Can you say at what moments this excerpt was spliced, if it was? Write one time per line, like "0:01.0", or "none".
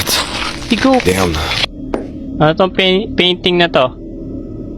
0:01.5